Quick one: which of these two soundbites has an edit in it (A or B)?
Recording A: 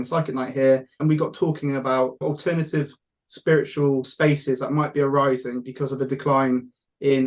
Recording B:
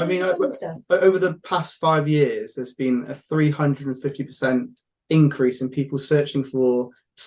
A